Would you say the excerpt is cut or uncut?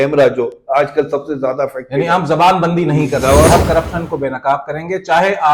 cut